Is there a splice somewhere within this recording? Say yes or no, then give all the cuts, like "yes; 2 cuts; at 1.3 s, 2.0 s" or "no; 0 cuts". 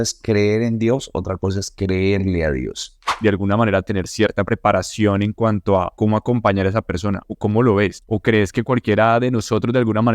yes; 4 cuts; at 3.1 s, 5.9 s, 7.3 s, 8.0 s